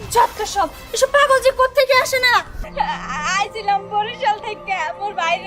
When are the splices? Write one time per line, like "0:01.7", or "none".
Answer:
0:02.7